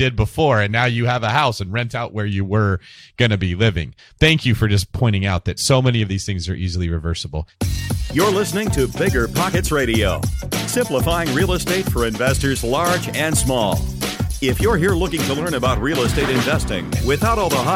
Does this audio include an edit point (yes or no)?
yes